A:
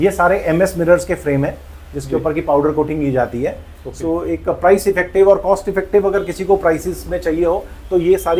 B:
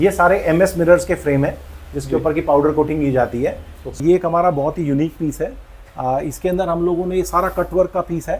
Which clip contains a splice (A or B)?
B